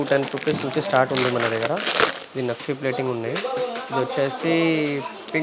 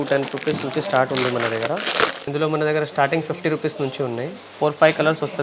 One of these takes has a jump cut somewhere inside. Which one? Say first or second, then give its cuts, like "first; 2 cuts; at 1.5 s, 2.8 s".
second; 2 cuts; at 2.2 s, 4.4 s